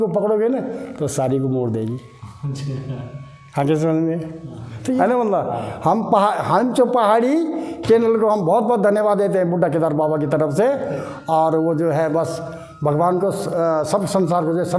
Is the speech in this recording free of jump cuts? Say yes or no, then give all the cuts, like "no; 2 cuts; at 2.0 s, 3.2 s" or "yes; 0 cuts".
no; 1 cut; at 5.1 s